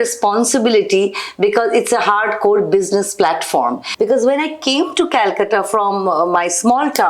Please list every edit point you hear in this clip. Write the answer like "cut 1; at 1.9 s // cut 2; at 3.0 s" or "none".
cut 1; at 3.8 s